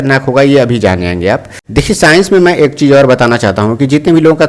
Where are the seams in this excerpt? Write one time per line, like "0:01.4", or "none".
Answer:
0:01.6